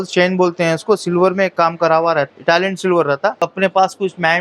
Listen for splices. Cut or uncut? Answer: cut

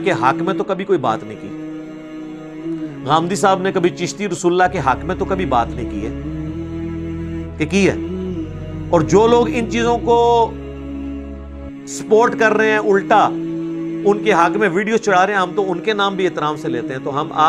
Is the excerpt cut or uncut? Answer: uncut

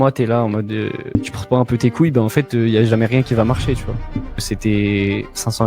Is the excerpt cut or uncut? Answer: cut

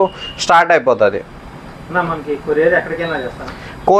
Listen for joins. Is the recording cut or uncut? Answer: uncut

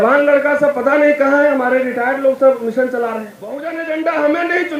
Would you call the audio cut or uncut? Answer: cut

